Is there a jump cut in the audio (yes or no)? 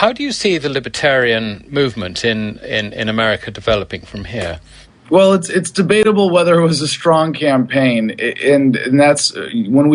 no